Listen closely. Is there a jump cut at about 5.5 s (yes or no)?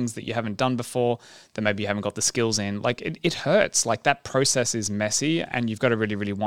yes